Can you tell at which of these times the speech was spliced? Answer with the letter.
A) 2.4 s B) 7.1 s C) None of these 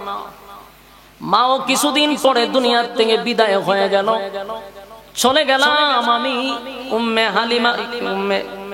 C